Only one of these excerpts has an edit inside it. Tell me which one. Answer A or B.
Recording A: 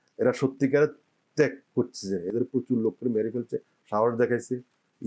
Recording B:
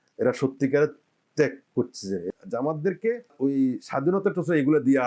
B